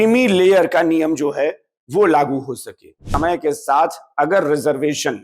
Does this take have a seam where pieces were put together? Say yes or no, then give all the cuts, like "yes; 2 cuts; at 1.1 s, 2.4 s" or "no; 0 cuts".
yes; 1 cut; at 3.0 s